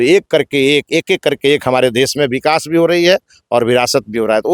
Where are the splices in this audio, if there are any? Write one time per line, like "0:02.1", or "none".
none